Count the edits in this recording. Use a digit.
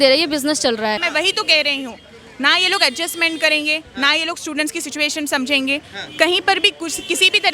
1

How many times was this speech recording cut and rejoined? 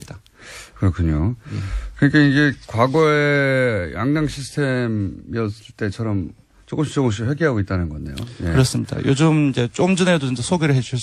1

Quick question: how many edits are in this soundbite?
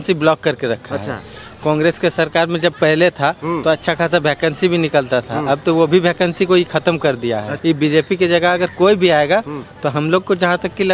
1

